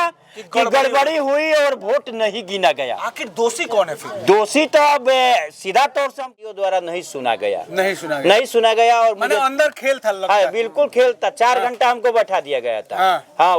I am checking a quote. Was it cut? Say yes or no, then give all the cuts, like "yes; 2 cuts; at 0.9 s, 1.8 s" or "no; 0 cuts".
yes; 1 cut; at 6.4 s